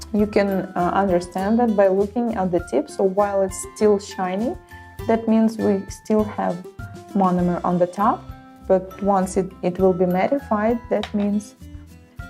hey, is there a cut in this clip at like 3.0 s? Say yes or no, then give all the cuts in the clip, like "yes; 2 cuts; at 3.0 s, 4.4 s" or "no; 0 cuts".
no; 0 cuts